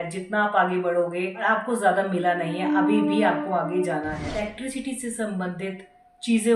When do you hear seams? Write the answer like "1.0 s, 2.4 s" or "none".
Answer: 1.4 s, 4.4 s